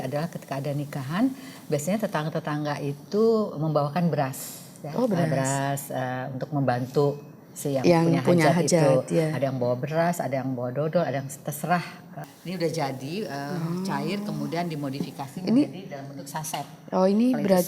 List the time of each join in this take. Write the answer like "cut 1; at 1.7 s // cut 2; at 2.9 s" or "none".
cut 1; at 12.3 s